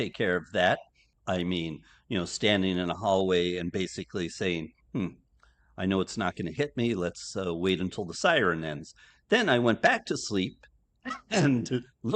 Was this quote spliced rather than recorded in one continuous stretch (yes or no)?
yes